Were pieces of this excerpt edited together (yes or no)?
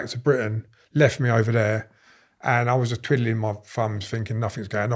no